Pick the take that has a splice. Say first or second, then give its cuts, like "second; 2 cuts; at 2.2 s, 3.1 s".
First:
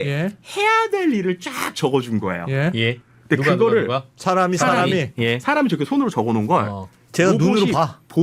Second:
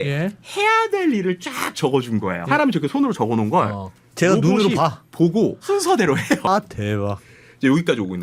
second; 3 cuts; at 2.4 s, 5.6 s, 6.5 s